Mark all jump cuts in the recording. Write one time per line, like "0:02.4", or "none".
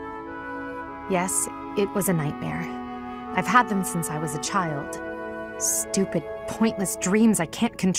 0:01.0